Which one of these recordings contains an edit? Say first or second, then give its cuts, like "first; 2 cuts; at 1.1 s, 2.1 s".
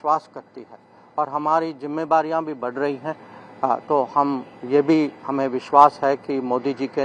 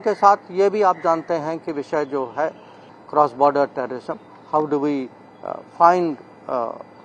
second; 1 cut; at 2.9 s